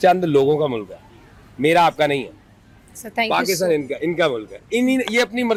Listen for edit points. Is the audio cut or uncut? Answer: uncut